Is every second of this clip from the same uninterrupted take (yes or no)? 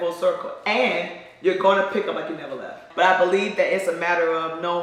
no